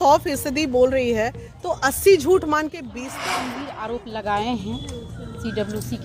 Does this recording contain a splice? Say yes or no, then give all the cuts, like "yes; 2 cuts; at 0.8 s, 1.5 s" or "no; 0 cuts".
yes; 1 cut; at 3.1 s